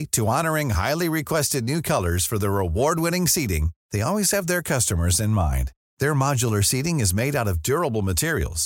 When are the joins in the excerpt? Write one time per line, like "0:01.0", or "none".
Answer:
none